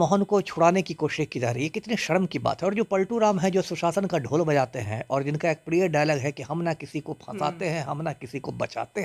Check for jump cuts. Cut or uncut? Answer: uncut